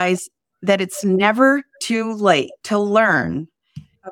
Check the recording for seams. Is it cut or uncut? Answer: cut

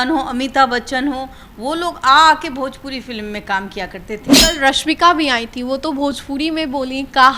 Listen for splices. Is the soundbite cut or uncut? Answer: cut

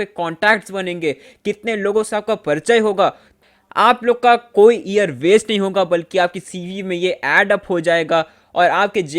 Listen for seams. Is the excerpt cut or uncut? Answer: cut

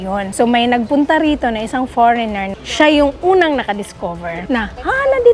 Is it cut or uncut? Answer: cut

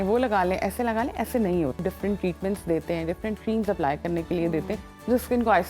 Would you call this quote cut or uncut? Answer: cut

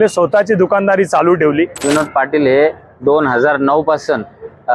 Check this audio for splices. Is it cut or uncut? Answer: cut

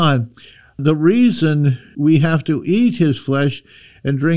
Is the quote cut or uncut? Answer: cut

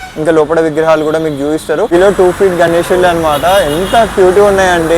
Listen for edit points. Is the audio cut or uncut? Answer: cut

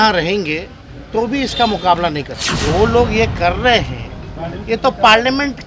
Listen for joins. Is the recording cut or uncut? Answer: cut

